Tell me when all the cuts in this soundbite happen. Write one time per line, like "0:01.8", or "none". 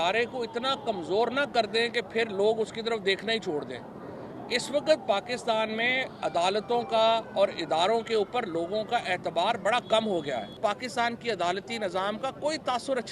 0:10.6